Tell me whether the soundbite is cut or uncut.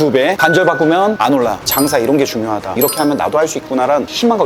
cut